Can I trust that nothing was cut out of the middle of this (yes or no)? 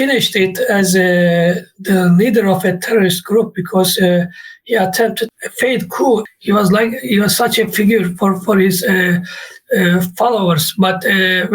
no